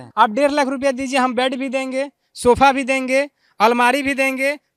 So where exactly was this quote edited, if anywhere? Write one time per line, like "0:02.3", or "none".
none